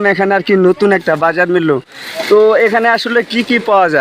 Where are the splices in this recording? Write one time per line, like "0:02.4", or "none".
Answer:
none